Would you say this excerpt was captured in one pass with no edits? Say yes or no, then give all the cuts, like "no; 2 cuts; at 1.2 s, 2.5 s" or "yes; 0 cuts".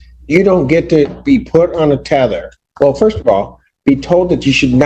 yes; 0 cuts